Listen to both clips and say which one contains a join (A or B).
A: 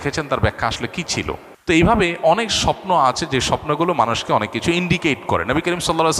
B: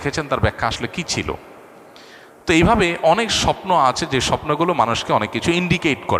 A